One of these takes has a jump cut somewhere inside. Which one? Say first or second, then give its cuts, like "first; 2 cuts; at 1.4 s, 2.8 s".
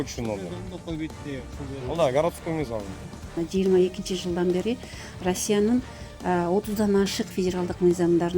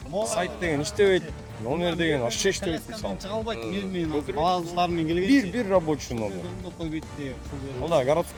first; 1 cut; at 3.4 s